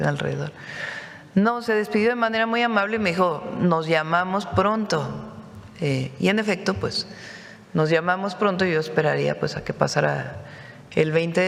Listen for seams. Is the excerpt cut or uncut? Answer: uncut